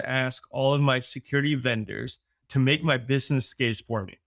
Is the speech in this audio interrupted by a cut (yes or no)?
yes